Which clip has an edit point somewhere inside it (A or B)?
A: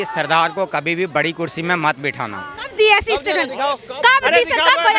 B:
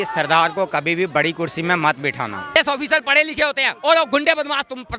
B